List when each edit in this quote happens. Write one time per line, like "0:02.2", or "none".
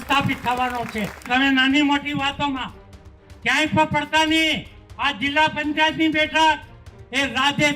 0:01.3